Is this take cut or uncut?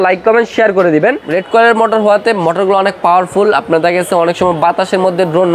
cut